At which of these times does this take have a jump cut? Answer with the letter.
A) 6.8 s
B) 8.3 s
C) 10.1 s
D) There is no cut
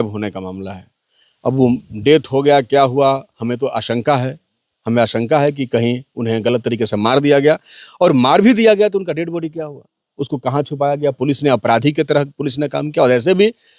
D